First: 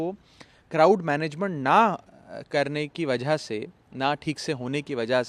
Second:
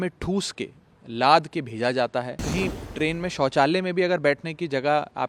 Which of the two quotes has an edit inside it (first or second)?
second